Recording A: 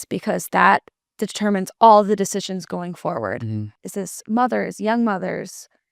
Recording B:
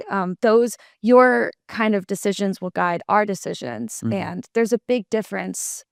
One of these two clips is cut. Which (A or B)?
A